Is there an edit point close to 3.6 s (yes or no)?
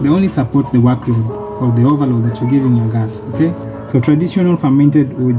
yes